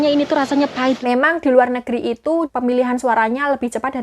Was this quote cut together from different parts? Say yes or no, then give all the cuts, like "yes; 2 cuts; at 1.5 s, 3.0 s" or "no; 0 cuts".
yes; 2 cuts; at 1.0 s, 2.5 s